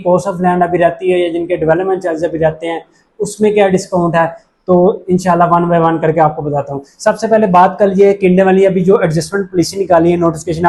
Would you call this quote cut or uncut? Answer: uncut